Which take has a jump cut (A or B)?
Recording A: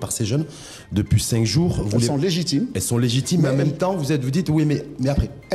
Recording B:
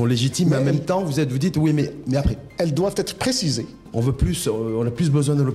B